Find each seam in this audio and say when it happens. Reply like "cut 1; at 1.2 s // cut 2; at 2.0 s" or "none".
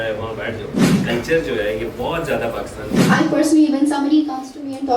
cut 1; at 0.9 s // cut 2; at 2.8 s